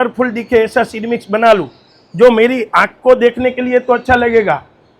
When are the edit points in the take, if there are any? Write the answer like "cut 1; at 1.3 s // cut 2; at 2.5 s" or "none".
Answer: none